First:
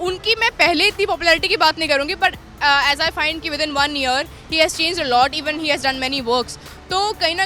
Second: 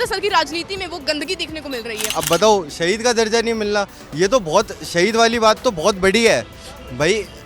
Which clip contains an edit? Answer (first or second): second